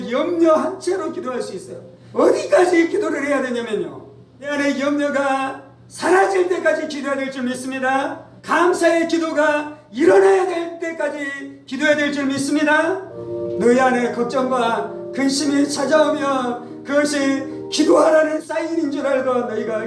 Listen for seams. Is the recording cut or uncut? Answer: cut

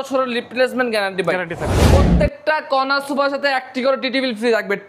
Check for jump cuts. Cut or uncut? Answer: cut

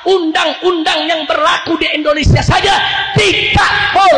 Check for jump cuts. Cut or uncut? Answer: uncut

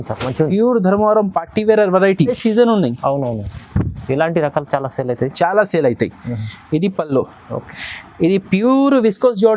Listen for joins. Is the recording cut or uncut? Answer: cut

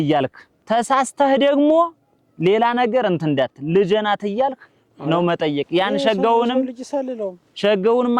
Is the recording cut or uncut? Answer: uncut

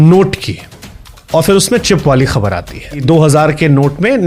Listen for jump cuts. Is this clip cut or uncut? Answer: cut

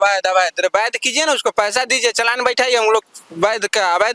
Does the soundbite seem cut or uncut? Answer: uncut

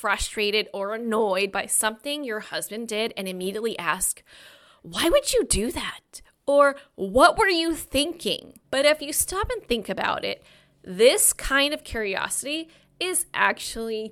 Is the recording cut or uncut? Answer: cut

